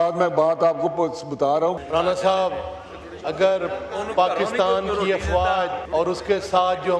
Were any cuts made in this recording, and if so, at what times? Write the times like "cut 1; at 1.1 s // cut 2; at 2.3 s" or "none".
cut 1; at 1.8 s // cut 2; at 5.8 s